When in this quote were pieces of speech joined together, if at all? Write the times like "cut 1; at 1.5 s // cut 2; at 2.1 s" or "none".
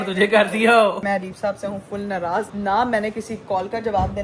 cut 1; at 1.0 s // cut 2; at 2.5 s